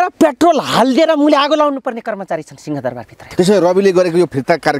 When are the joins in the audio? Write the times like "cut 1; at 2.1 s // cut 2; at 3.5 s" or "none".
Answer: cut 1; at 3.2 s